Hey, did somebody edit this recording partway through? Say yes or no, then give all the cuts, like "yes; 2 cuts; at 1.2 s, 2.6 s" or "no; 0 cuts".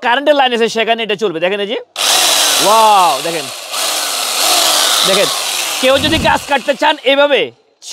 no; 0 cuts